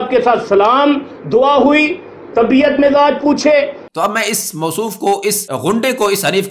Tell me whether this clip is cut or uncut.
cut